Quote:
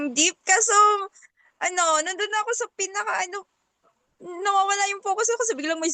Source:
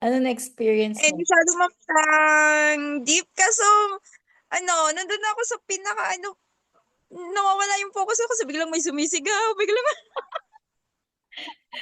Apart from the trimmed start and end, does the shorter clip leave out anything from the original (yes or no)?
no